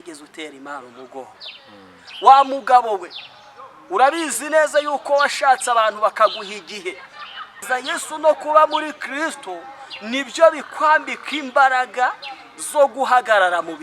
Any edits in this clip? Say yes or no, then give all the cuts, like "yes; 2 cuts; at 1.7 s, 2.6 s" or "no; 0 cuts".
yes; 1 cut; at 7.6 s